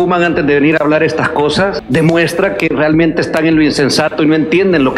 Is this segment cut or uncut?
cut